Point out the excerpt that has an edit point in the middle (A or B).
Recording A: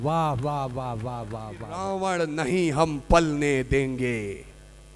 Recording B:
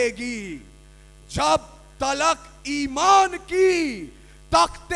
A